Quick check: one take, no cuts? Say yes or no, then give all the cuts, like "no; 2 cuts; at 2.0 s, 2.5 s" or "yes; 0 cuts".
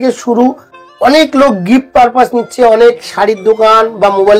yes; 0 cuts